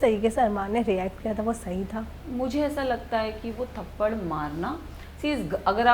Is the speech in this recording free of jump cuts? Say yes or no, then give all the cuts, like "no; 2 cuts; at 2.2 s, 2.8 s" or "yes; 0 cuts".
no; 1 cut; at 2.2 s